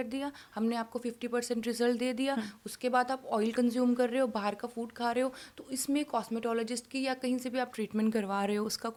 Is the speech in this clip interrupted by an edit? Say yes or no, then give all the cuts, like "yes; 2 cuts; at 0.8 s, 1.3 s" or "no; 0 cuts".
no; 0 cuts